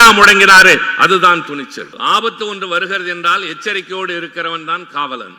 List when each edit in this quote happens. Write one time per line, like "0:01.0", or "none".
0:01.9